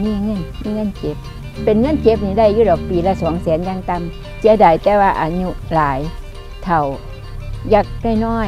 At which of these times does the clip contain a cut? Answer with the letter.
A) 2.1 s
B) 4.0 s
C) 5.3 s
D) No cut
D